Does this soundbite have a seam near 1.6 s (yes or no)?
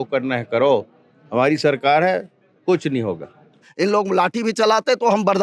no